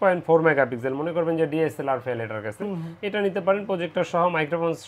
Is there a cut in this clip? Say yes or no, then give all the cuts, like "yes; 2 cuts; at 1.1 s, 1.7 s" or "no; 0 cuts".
no; 0 cuts